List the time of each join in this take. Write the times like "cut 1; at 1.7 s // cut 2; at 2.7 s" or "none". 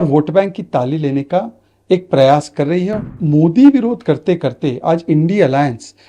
cut 1; at 3.0 s